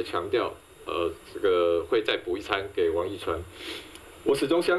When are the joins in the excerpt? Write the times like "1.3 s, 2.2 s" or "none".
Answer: none